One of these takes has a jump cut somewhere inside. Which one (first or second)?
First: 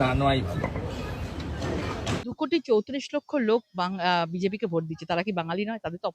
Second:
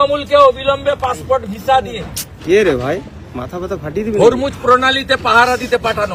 first